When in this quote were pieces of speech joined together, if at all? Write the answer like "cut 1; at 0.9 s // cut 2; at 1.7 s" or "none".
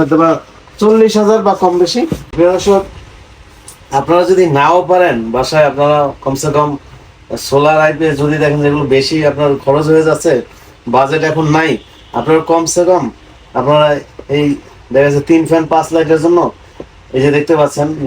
cut 1; at 2.3 s